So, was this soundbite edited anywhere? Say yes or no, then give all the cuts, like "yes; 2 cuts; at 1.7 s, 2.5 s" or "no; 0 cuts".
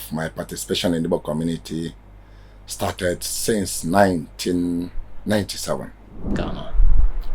yes; 1 cut; at 6.3 s